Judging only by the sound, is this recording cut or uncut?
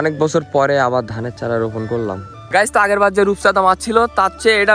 cut